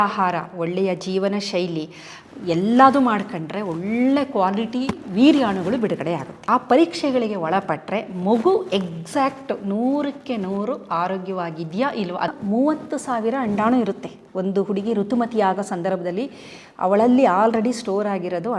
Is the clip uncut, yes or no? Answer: no